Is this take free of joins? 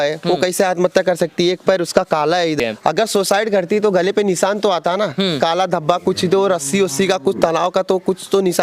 no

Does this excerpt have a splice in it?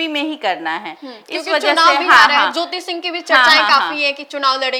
no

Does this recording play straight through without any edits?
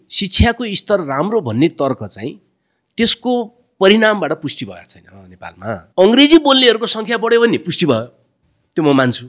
no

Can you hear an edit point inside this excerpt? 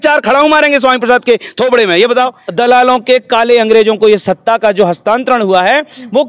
yes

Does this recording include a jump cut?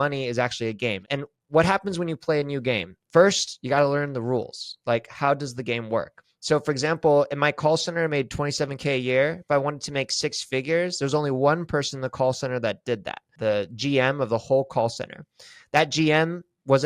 yes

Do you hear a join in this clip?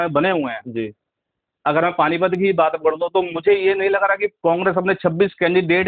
no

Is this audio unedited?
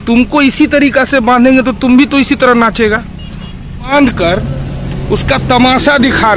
no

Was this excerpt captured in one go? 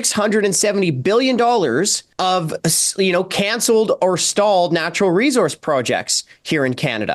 no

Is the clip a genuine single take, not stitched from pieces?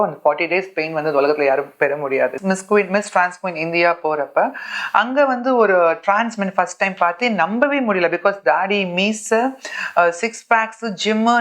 no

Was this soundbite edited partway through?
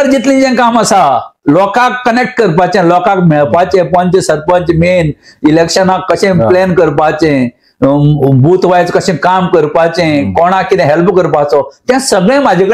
no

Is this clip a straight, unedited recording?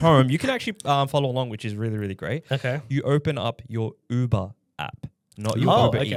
yes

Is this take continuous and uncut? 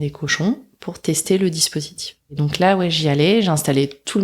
no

